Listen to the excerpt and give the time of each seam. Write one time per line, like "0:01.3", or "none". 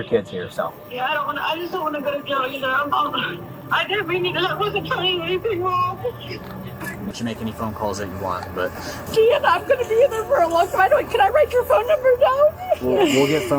0:07.1